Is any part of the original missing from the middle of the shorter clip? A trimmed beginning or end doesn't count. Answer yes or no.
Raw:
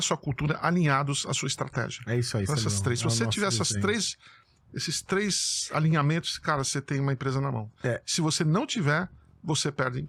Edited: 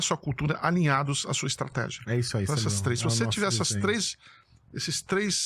no